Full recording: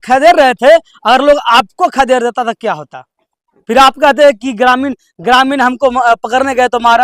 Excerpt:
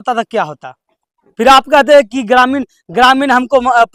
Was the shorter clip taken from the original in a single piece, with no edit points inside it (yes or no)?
yes